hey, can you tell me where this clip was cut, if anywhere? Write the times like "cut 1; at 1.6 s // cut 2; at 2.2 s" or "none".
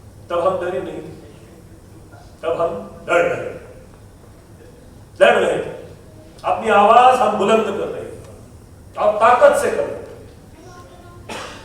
none